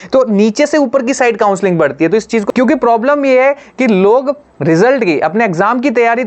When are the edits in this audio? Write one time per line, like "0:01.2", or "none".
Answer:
0:02.4